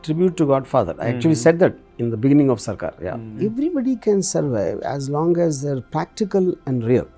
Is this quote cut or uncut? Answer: cut